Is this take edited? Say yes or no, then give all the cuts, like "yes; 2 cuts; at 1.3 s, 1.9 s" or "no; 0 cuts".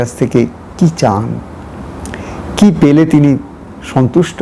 no; 0 cuts